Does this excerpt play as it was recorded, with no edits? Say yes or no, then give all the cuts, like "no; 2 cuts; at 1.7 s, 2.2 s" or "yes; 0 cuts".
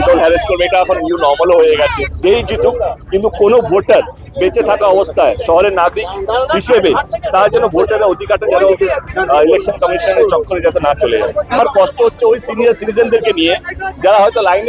no; 2 cuts; at 2.1 s, 11.6 s